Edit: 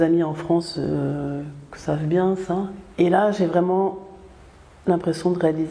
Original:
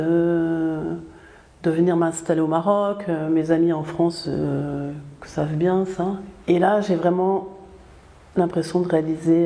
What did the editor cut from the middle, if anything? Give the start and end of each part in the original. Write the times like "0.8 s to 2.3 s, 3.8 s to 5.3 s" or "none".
none